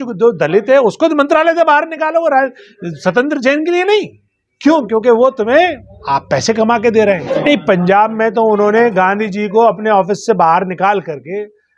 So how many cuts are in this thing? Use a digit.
1